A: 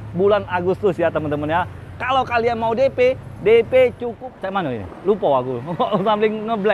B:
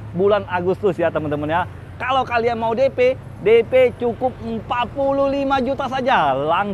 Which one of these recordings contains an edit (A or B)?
A